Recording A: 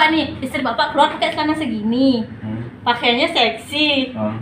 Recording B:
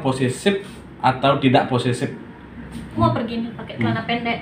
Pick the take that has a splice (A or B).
B